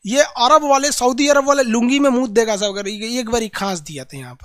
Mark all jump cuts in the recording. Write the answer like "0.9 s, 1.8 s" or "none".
none

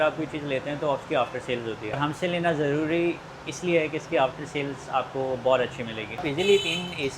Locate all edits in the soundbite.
6.3 s

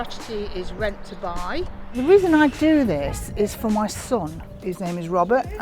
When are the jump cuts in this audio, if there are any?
1.8 s

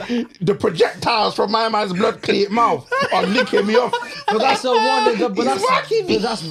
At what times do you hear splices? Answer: none

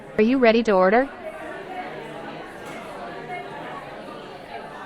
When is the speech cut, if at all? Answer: 1.1 s

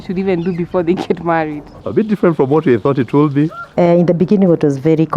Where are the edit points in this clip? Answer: 1.7 s, 3.6 s

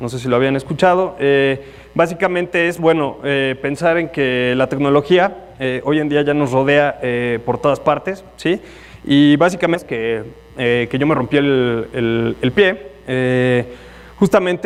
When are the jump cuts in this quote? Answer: none

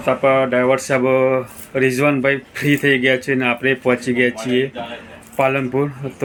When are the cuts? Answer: none

